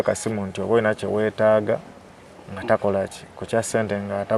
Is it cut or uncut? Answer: uncut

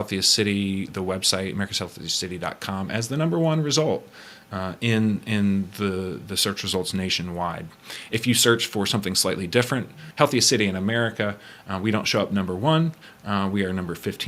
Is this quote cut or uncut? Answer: cut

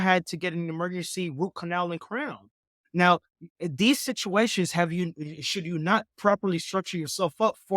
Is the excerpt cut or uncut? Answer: cut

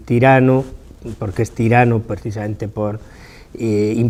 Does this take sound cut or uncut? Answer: uncut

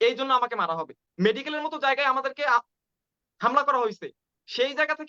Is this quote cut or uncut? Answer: cut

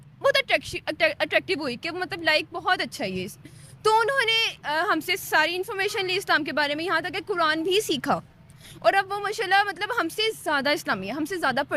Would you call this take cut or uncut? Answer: uncut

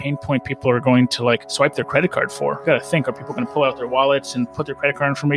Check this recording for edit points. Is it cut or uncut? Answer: cut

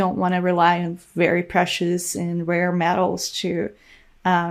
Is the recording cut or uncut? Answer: uncut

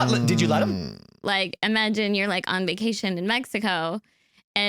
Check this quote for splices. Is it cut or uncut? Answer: cut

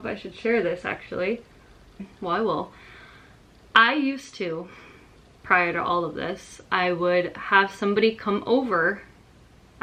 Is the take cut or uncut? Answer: uncut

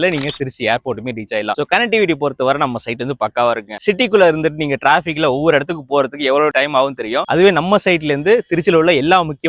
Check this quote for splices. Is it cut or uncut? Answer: uncut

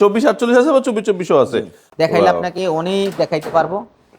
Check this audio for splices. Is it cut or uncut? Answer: cut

